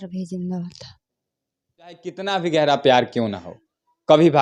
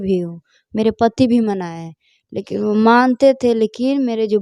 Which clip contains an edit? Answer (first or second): first